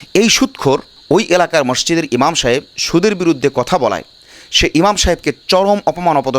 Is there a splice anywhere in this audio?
yes; 1 cut; at 0.9 s

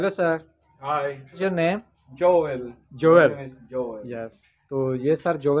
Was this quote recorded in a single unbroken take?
no; 1 cut; at 1.3 s

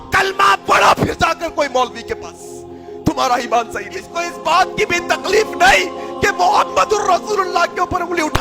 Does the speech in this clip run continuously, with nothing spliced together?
no; 1 cut; at 4.2 s

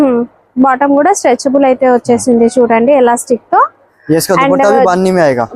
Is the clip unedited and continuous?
yes; 0 cuts

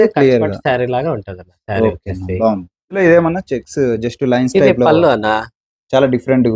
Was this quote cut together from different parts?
yes; 1 cut; at 3.0 s

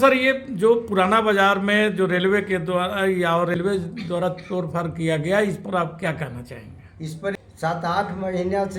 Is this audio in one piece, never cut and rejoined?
no; 2 cuts; at 3.5 s, 7.3 s

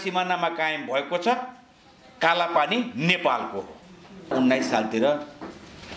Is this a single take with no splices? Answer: no; 1 cut; at 4.3 s

